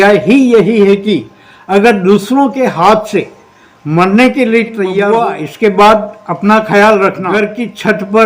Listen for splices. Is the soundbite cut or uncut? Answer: cut